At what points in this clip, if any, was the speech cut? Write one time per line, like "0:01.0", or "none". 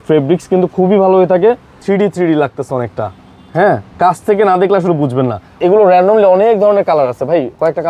0:01.8
0:05.5